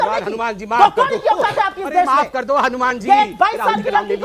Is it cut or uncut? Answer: uncut